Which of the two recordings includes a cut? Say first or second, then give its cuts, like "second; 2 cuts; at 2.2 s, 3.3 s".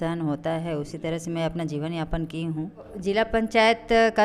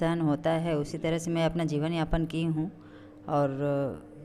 first; 1 cut; at 2.9 s